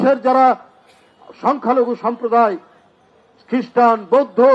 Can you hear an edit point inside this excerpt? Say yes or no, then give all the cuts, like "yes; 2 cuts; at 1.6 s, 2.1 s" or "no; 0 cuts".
no; 0 cuts